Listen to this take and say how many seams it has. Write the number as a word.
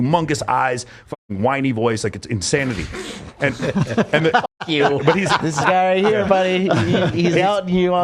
one